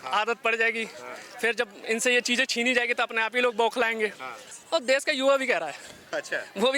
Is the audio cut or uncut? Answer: cut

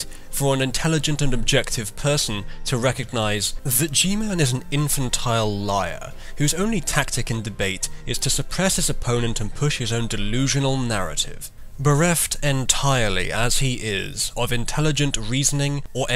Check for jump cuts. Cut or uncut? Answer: uncut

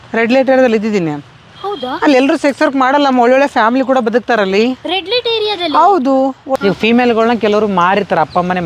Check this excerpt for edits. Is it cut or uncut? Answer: cut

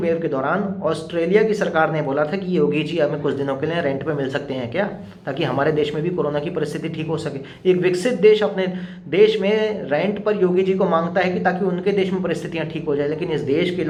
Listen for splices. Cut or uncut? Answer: uncut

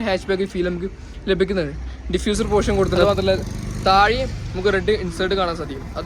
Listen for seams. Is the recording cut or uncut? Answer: cut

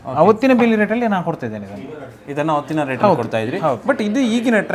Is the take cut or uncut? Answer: uncut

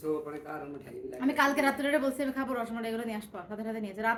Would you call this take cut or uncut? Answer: uncut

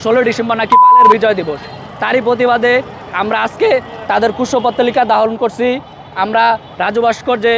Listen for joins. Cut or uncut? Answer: uncut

